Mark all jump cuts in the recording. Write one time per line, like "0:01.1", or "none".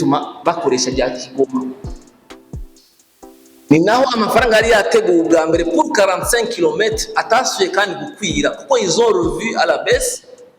0:01.8
0:03.3